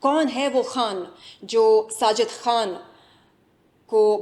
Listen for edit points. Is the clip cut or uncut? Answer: uncut